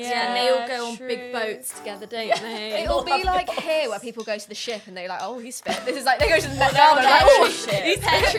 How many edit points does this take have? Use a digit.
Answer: 0